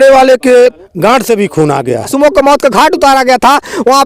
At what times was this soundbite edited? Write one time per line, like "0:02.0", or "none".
0:00.9
0:02.1